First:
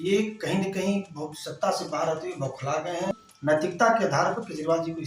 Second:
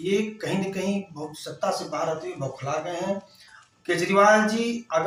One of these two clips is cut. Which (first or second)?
first